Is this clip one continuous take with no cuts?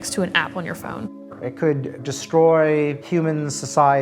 no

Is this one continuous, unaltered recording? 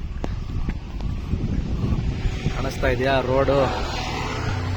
yes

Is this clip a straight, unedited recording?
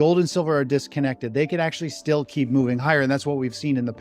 yes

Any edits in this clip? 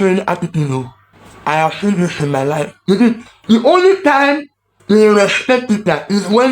yes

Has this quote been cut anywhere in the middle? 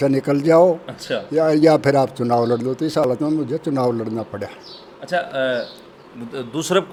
no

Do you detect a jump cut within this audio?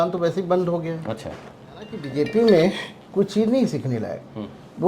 yes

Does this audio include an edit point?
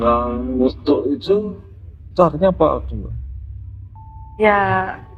no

